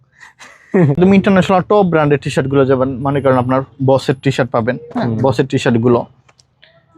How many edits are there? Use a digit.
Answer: 1